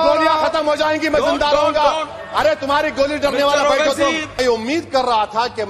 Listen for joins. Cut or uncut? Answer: cut